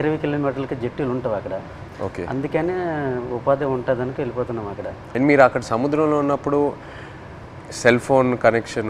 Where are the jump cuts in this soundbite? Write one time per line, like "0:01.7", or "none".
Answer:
0:05.0